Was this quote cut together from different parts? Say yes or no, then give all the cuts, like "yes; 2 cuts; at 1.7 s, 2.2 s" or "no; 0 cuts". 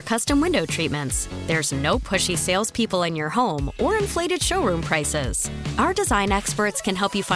no; 0 cuts